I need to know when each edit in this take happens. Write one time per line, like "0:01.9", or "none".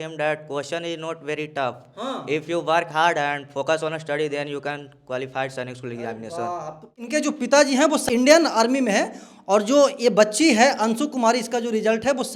0:06.9
0:08.0

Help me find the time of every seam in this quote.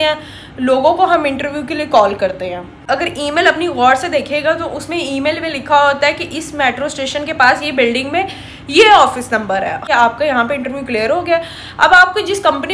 0:02.8
0:09.8

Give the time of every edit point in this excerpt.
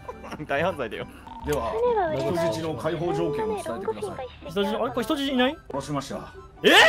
0:01.2
0:05.7

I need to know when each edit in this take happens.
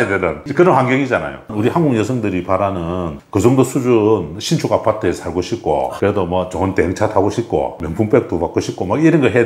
0:01.5

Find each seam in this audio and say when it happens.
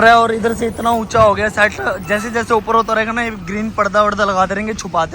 none

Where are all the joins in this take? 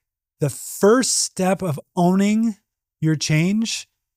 none

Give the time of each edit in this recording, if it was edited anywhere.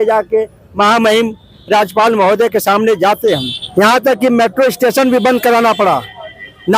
0:03.6

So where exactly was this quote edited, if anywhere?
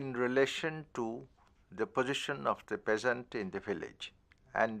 0:01.1

